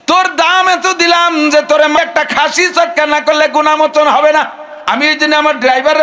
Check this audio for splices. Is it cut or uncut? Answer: cut